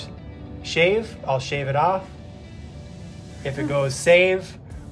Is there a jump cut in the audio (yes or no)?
no